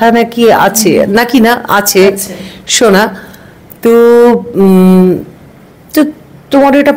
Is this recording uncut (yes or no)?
yes